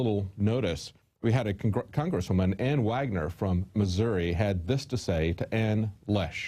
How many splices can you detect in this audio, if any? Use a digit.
0